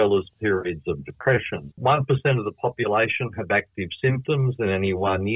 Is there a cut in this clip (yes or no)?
yes